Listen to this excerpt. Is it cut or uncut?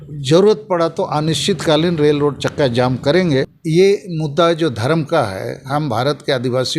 cut